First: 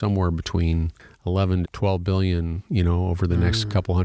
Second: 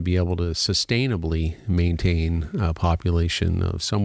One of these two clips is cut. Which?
first; 1 cut; at 1.6 s

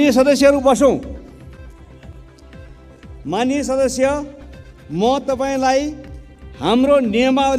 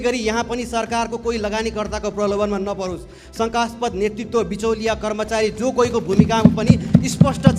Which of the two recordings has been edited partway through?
first; 2 cuts; at 1.4 s, 3.2 s

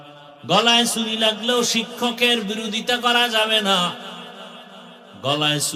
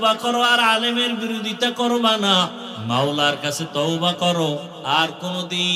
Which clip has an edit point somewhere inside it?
second; 1 cut; at 2.7 s

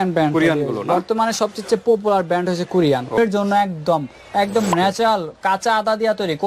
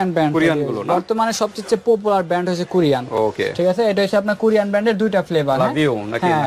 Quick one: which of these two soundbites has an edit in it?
first; 1 cut; at 3.2 s

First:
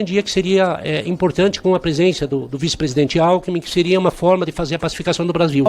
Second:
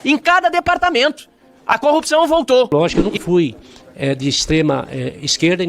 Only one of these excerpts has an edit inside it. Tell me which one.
second; 1 cut; at 2.7 s

